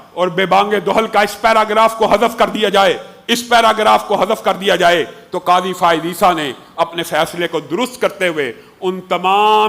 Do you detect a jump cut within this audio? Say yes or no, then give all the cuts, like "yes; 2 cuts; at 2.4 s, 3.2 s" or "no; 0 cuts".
no; 0 cuts